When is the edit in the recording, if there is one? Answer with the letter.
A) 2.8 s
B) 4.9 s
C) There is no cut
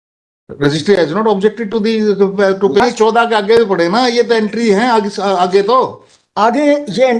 A